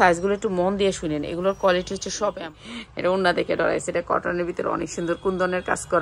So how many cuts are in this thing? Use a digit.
1